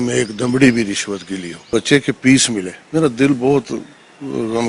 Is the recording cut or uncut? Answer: cut